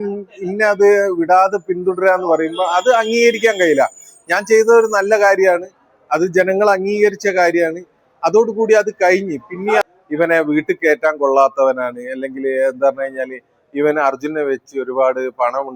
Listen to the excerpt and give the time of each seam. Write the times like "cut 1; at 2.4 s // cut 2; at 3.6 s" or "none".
cut 1; at 9.8 s